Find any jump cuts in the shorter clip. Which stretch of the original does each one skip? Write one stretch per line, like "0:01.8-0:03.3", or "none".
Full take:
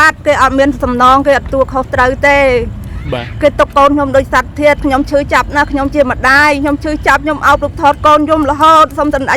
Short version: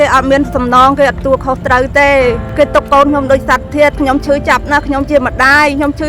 0:02.7-0:03.3